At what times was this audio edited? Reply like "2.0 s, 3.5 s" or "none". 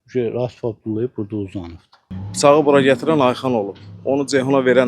2.2 s